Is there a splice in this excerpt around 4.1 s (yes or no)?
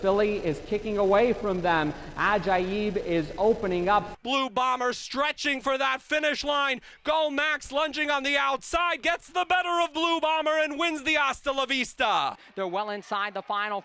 yes